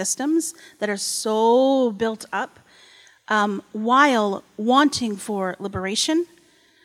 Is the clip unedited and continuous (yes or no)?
yes